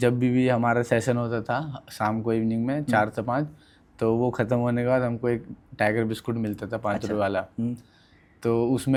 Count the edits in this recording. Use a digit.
0